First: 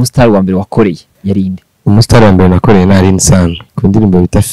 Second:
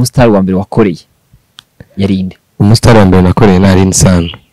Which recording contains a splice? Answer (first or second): first